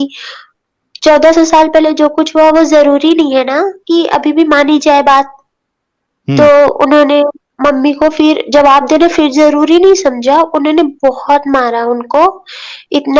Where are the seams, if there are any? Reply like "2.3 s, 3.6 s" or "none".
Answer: 7.4 s